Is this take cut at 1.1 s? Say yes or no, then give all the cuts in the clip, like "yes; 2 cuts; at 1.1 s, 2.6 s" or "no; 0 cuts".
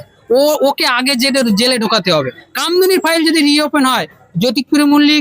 no; 1 cut; at 2.5 s